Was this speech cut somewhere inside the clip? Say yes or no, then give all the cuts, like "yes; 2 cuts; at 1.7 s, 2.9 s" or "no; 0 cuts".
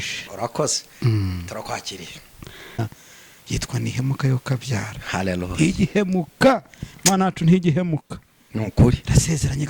yes; 1 cut; at 2.8 s